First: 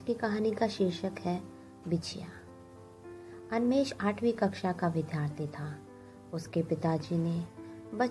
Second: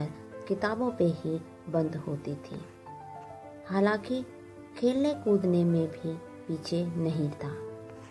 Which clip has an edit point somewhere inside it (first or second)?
first